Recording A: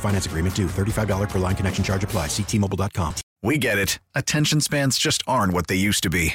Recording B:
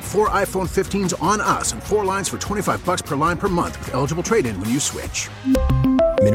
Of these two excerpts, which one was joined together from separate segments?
A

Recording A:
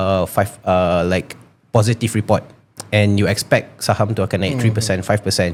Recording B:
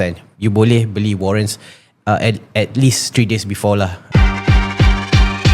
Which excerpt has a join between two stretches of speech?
B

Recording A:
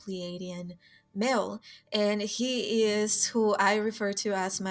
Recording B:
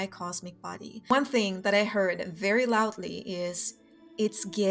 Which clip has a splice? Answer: B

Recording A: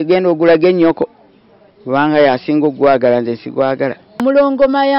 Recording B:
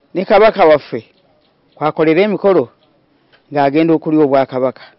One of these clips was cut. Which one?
A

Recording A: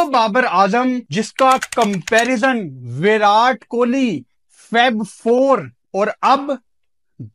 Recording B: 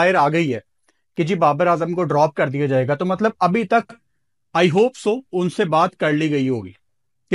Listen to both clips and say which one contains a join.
A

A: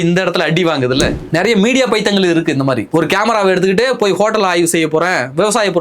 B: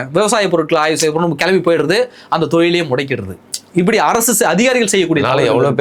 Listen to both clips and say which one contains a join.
A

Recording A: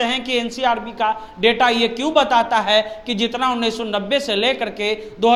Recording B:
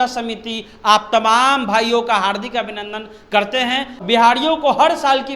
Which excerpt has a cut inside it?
B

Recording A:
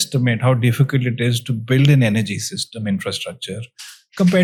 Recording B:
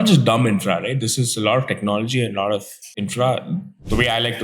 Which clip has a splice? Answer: B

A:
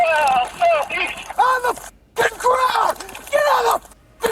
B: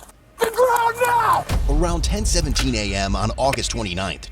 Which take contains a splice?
B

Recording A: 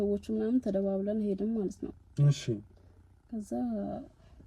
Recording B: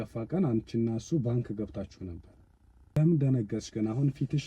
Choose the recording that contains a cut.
B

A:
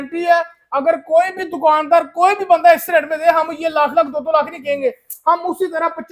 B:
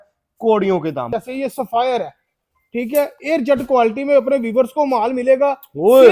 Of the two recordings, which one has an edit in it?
B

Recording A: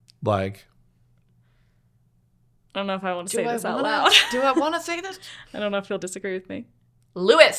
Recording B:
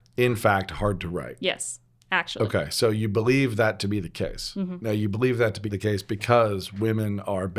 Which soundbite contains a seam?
B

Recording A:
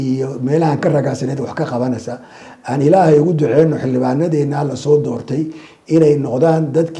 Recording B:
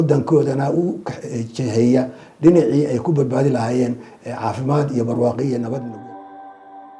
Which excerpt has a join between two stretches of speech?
B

